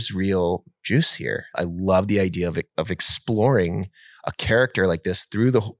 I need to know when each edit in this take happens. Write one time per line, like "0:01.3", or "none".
0:01.6